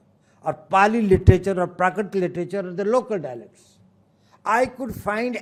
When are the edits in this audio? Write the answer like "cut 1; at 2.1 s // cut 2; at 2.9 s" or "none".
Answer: none